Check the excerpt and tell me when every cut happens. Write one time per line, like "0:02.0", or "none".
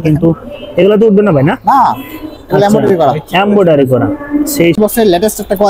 0:04.8